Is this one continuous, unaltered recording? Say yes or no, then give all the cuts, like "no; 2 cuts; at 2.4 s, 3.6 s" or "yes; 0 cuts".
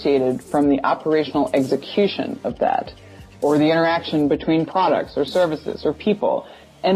yes; 0 cuts